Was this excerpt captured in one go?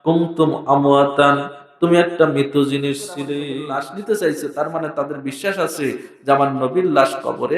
no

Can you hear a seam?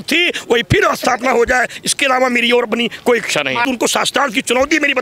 yes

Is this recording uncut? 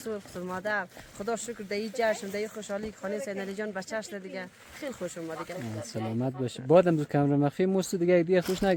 yes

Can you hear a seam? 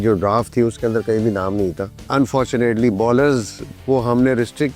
yes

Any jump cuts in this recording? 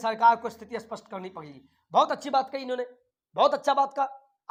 no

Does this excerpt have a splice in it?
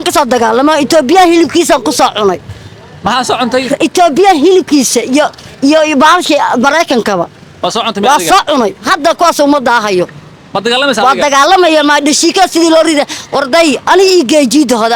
no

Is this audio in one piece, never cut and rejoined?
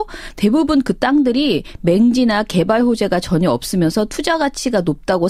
yes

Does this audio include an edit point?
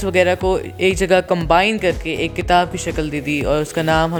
no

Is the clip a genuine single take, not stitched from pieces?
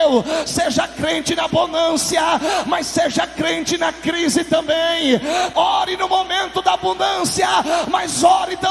no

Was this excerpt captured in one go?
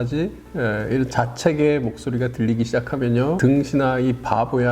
no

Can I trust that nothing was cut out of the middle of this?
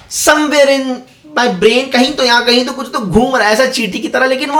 yes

